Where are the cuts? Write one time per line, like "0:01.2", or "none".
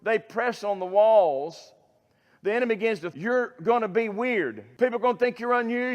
0:03.1
0:04.6